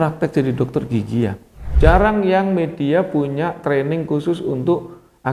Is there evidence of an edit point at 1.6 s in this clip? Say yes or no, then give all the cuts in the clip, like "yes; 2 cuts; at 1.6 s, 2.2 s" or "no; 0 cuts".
yes; 1 cut; at 1.6 s